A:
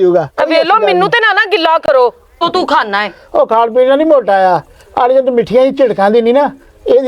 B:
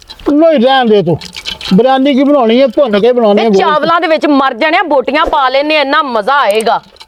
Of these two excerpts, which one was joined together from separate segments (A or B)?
A